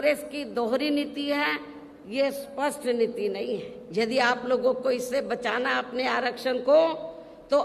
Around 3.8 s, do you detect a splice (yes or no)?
yes